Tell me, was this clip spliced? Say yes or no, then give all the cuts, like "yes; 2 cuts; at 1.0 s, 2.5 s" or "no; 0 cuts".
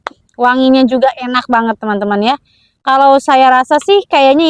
no; 0 cuts